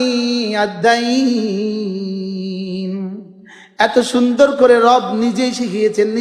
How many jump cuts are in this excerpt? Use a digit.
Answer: 0